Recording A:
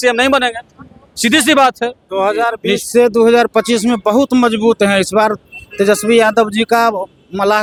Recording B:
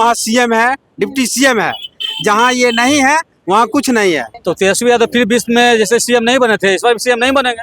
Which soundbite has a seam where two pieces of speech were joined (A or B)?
B